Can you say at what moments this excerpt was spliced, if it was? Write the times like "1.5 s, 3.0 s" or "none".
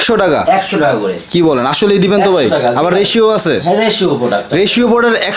none